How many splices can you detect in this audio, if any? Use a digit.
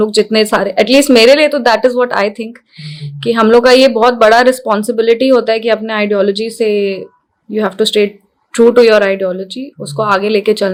0